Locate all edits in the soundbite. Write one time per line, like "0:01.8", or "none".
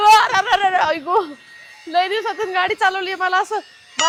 none